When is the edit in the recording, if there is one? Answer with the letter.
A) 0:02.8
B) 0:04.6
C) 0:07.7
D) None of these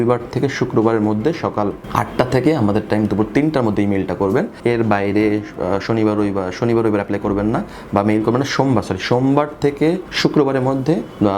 D